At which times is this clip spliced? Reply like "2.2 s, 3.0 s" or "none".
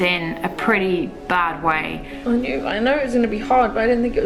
2.1 s